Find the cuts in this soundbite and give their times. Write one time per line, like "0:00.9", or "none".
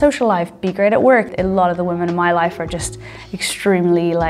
0:01.3